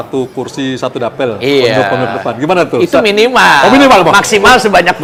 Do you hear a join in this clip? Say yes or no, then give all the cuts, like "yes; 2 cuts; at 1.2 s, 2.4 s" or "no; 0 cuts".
no; 0 cuts